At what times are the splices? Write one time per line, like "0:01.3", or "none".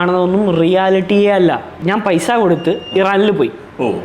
0:01.7